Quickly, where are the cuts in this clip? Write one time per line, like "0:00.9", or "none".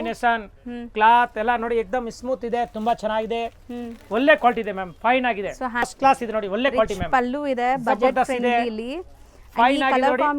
0:05.9